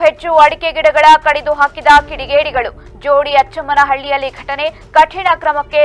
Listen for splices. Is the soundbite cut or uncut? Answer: uncut